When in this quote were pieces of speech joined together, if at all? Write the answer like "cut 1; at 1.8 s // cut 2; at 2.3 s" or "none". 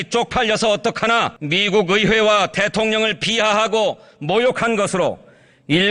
cut 1; at 1.4 s